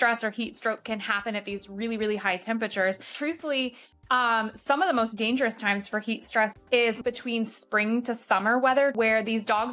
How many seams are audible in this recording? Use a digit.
3